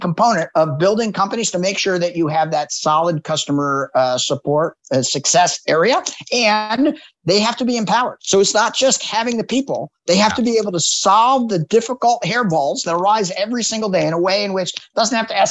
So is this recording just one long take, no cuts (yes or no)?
yes